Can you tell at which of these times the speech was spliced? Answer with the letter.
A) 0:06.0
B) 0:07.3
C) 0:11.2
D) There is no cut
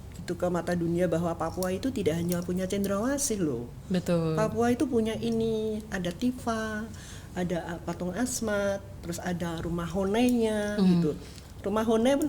D